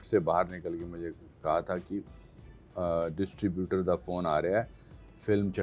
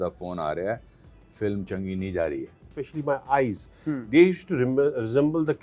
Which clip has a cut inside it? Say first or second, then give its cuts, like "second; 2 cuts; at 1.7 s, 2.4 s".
second; 1 cut; at 2.8 s